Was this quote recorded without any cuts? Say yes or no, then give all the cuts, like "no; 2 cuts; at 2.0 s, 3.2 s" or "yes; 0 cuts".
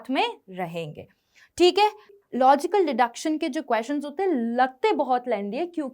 no; 1 cut; at 2.1 s